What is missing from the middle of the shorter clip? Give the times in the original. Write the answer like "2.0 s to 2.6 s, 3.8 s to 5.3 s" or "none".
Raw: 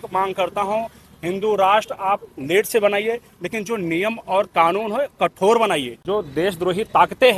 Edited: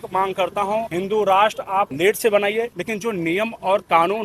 0.9 s to 1.2 s, 2.2 s to 2.4 s, 3.3 s to 3.4 s